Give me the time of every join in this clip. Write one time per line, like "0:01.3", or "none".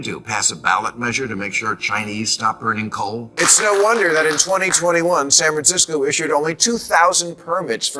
0:03.3